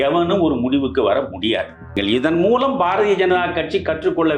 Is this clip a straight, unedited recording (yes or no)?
no